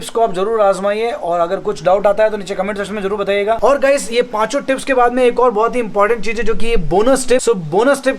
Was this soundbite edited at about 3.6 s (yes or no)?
yes